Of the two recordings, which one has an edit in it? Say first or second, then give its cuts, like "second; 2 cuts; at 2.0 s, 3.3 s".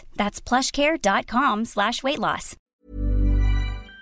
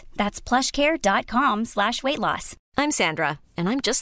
first; 1 cut; at 2.6 s